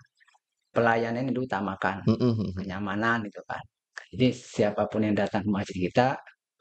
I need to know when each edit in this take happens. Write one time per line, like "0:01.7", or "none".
none